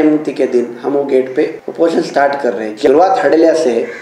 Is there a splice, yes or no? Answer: yes